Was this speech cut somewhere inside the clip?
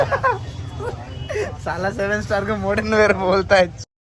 no; 0 cuts

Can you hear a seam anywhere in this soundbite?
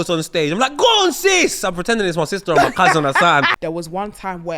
yes; 1 cut; at 3.6 s

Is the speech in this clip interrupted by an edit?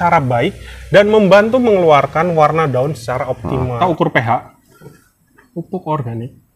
yes; 1 cut; at 3.8 s

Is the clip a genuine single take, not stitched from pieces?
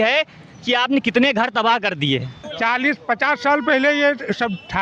no; 1 cut; at 2.4 s

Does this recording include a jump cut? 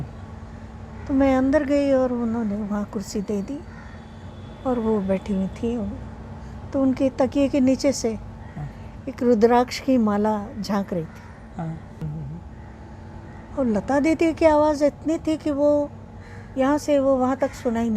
yes; 1 cut; at 12.0 s

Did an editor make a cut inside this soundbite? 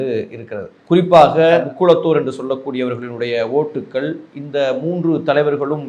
yes; 1 cut; at 1.6 s

